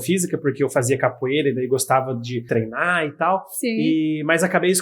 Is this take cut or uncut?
cut